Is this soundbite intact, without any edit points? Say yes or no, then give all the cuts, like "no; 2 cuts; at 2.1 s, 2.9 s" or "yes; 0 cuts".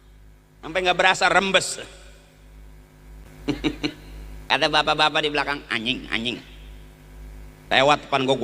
no; 1 cut; at 3.3 s